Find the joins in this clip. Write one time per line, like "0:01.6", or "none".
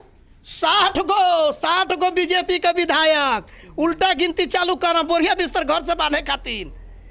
none